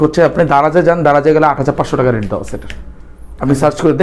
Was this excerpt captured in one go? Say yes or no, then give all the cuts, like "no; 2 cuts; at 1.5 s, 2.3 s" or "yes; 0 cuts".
yes; 0 cuts